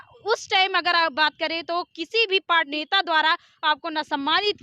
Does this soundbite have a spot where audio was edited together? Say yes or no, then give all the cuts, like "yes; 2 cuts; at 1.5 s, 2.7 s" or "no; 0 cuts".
yes; 1 cut; at 2.7 s